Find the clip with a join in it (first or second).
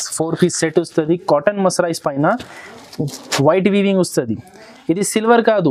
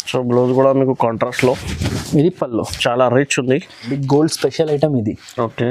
second